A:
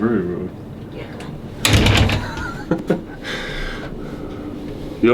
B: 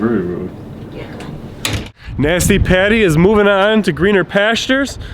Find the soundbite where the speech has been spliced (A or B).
B